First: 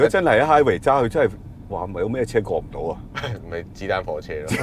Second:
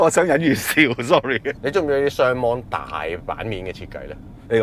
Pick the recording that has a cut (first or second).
second